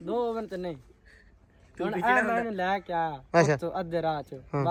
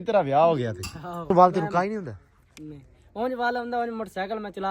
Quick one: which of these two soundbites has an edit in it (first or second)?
second